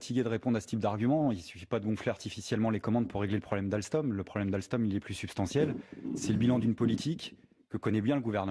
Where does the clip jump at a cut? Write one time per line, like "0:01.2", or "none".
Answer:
0:02.1